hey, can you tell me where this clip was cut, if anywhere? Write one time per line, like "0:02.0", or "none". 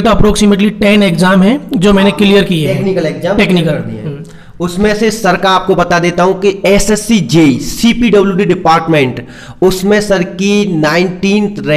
none